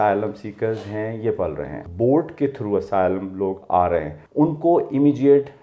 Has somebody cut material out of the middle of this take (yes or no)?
yes